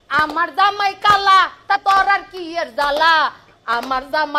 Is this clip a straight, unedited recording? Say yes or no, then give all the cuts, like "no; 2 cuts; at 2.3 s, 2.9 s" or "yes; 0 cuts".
no; 1 cut; at 1.8 s